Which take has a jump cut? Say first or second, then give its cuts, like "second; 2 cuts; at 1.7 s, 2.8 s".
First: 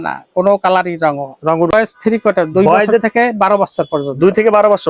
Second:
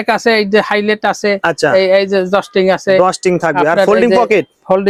first; 1 cut; at 1.7 s